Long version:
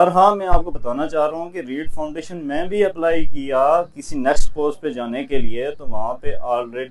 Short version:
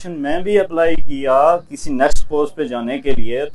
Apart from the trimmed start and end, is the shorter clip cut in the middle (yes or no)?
no